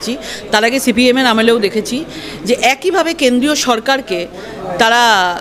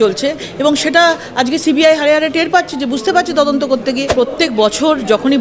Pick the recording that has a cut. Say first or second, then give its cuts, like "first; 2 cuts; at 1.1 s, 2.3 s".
second; 1 cut; at 4.1 s